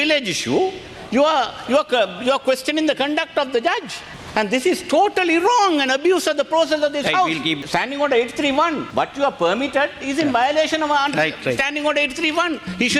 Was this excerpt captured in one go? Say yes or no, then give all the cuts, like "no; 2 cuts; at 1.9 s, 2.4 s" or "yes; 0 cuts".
no; 2 cuts; at 7.6 s, 8.8 s